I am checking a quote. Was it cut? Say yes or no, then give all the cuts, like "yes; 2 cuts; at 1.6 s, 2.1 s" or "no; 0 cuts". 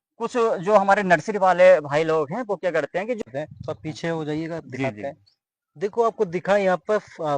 yes; 1 cut; at 3.2 s